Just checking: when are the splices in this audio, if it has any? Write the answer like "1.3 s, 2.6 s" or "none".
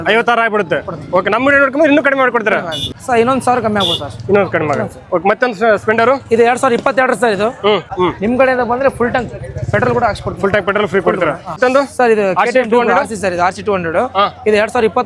2.9 s, 7.9 s, 11.6 s